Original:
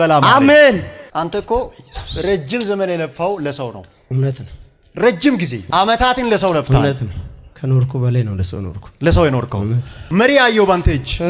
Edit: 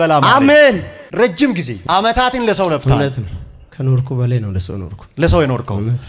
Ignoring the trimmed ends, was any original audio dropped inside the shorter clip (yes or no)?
yes